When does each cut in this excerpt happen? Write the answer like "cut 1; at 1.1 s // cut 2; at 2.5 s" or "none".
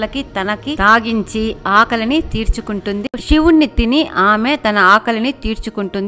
cut 1; at 3.2 s